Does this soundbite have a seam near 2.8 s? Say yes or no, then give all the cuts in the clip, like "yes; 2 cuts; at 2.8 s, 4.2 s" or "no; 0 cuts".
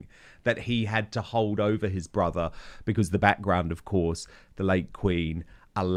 no; 0 cuts